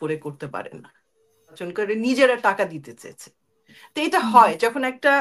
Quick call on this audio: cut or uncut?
cut